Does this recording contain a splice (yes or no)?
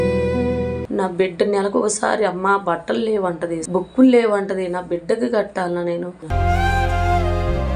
yes